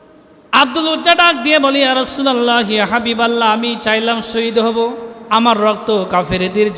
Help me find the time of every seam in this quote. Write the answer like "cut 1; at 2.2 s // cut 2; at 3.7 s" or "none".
cut 1; at 5.1 s